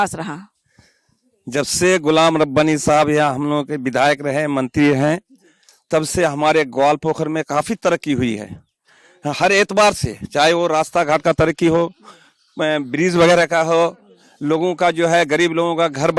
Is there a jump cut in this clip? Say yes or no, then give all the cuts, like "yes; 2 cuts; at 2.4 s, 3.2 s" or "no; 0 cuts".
no; 0 cuts